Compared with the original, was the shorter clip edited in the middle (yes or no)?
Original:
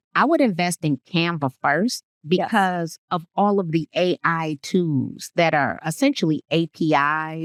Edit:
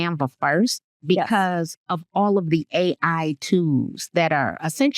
no